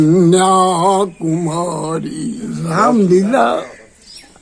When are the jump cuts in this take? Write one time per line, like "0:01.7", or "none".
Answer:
0:02.6